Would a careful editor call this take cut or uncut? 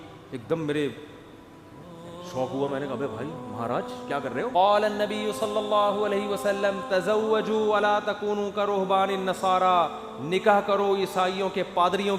cut